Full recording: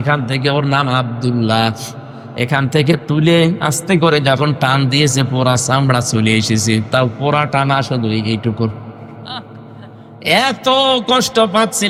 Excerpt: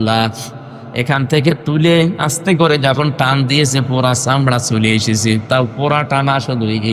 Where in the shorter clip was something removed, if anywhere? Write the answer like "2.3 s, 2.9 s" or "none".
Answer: none